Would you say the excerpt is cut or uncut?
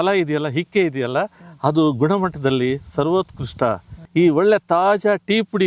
cut